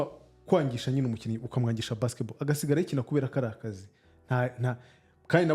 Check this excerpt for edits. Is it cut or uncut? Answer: uncut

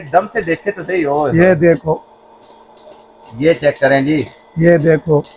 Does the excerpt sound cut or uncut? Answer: uncut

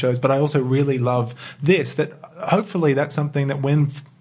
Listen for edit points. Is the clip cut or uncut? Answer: uncut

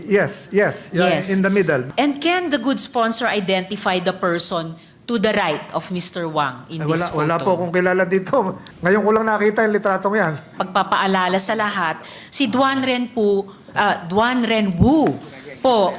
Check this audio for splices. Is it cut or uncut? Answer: cut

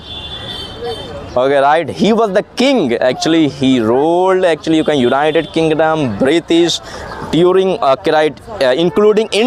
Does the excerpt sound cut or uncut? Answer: uncut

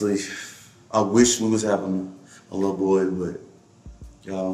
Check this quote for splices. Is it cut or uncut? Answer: uncut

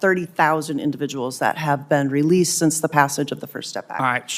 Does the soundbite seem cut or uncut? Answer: uncut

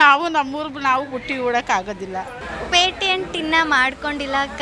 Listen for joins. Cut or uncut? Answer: cut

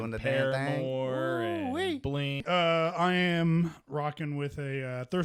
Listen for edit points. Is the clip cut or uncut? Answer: cut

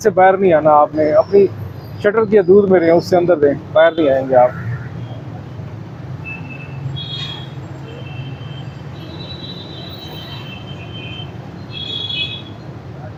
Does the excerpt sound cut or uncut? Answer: uncut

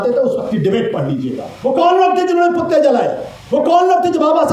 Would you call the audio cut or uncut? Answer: cut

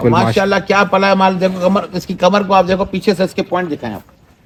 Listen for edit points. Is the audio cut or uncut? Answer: uncut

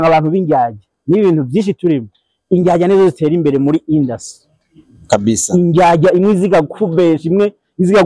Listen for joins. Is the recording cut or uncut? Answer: uncut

